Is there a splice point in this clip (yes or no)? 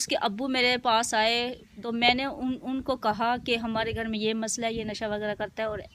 no